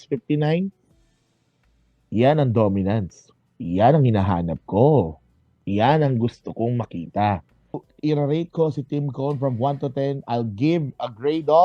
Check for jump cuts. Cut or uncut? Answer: cut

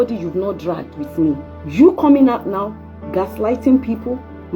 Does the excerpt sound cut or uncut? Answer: cut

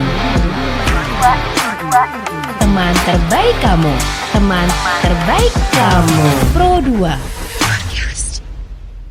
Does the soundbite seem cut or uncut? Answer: uncut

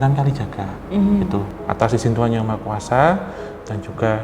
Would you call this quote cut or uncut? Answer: cut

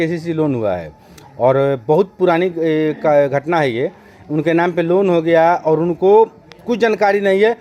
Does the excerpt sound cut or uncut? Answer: uncut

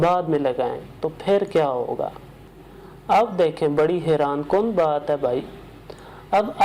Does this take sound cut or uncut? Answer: uncut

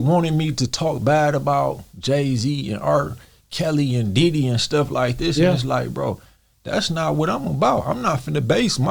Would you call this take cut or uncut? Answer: uncut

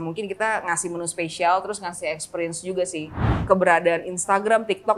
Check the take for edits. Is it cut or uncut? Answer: cut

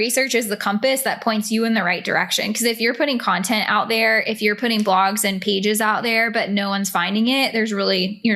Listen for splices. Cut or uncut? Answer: uncut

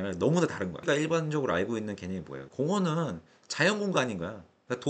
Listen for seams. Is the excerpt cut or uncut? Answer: cut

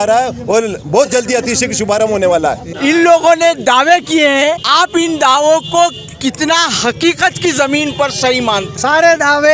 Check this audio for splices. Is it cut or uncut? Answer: cut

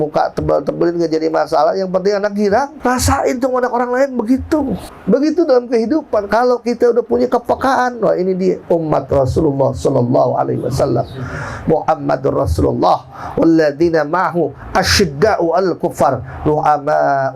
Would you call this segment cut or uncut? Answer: cut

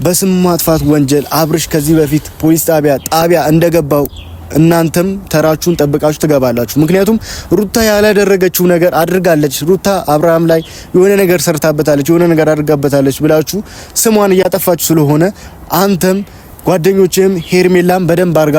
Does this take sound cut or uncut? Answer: uncut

